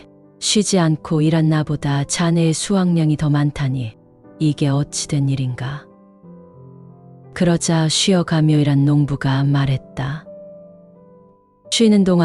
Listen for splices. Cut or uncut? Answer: cut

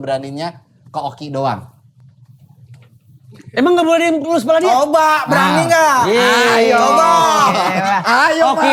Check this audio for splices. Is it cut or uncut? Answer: uncut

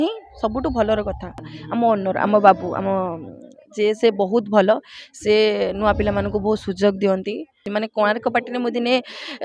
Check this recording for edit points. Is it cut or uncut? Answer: cut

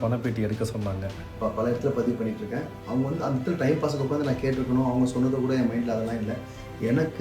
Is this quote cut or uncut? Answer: cut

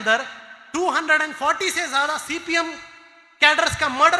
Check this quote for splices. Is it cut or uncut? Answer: uncut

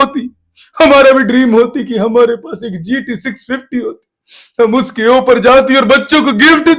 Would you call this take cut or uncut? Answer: uncut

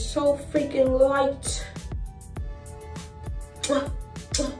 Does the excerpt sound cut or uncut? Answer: uncut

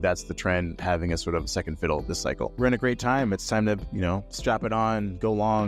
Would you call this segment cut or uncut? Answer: cut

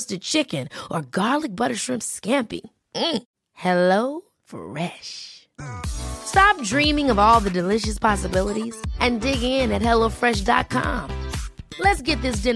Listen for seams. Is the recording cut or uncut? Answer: uncut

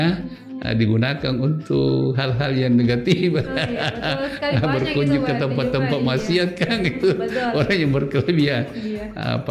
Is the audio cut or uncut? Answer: uncut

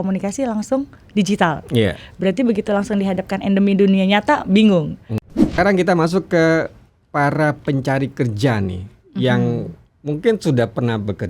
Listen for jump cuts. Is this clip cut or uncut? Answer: cut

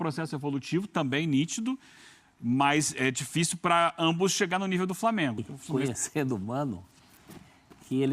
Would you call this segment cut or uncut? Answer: cut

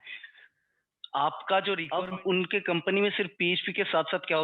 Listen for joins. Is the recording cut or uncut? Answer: cut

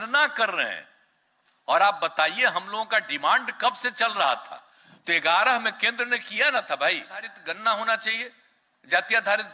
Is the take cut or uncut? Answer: cut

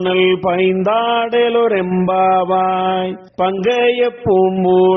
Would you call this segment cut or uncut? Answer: cut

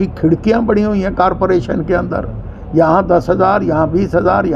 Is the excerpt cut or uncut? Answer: uncut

